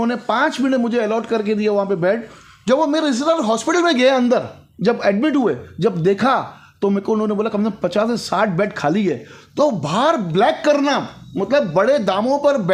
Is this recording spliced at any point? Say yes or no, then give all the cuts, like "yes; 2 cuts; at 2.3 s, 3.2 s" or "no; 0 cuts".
no; 0 cuts